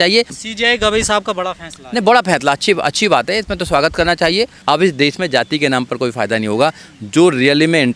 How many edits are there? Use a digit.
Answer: 1